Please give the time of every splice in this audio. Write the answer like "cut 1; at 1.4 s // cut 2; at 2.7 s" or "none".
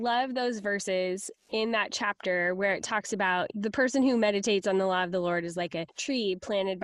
cut 1; at 3.5 s // cut 2; at 5.9 s